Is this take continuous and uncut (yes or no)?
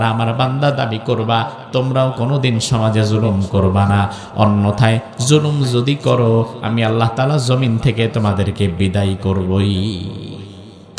yes